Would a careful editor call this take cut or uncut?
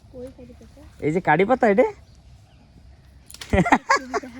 uncut